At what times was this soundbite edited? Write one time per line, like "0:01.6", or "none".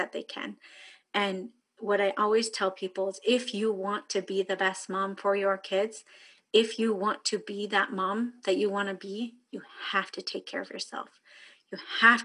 none

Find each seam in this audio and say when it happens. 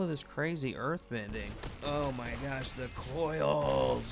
0:01.7

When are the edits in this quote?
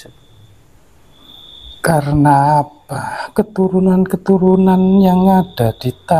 0:01.7

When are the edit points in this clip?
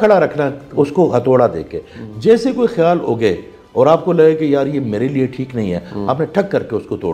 none

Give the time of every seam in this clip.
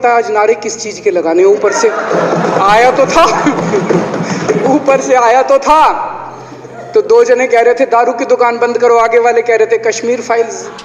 none

